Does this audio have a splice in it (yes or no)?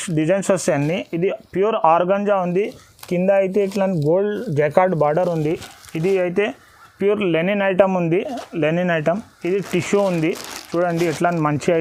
no